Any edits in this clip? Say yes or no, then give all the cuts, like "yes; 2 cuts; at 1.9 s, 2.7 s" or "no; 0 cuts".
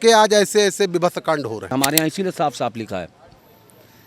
yes; 1 cut; at 1.6 s